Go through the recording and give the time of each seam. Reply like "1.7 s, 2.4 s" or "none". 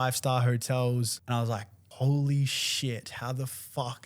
1.6 s

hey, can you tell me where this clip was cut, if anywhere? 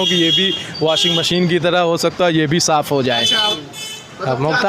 3.6 s

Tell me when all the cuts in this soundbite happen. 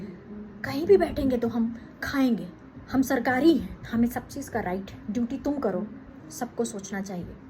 2.7 s, 3.8 s, 4.9 s, 6.2 s

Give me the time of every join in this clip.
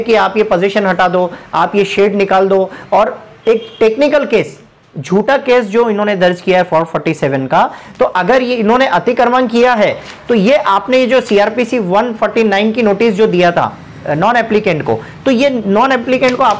none

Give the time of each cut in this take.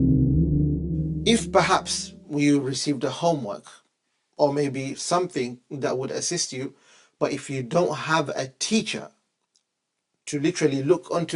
1.2 s

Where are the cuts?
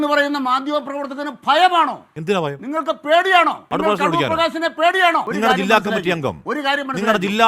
3.6 s, 5.3 s

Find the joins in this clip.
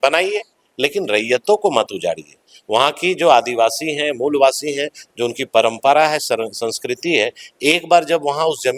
none

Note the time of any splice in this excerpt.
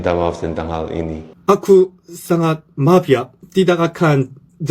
1.3 s

